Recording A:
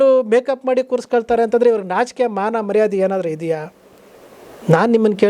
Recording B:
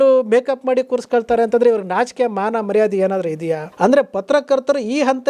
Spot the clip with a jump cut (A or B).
B